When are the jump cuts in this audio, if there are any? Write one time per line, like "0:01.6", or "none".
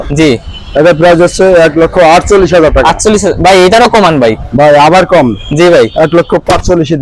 none